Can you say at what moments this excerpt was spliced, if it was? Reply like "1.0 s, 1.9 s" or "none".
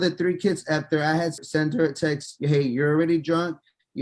1.4 s

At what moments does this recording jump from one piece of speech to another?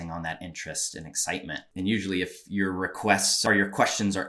1.6 s, 3.3 s

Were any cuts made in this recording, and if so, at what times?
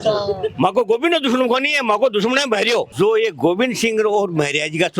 2.9 s

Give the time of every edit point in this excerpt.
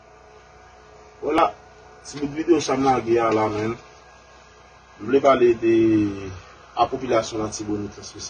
1.4 s

